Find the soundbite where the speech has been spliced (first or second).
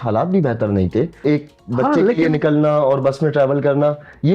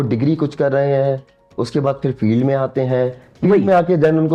first